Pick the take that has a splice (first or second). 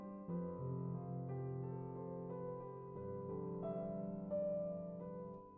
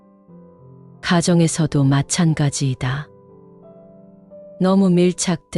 second